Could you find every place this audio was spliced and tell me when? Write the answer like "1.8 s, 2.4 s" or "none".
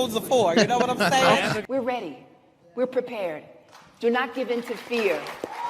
1.6 s

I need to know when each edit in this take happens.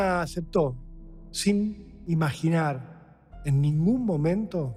none

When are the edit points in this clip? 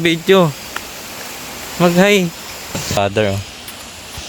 2.8 s

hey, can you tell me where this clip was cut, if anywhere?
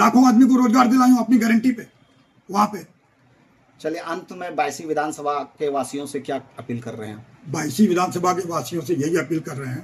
none

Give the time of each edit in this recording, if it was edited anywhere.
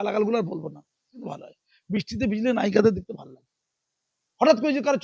1.3 s

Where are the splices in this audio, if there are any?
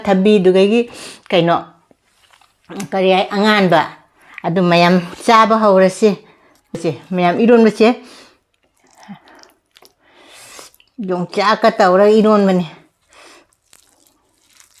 6.7 s

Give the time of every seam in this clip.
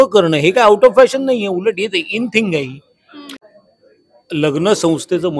3.3 s

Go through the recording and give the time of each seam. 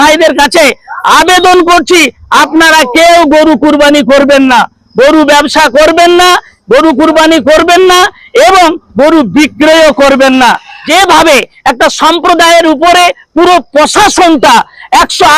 10.7 s

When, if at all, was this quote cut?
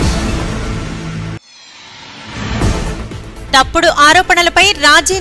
none

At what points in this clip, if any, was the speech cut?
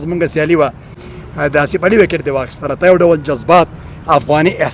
1.0 s

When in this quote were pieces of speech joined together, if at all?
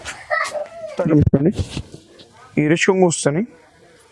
1.0 s

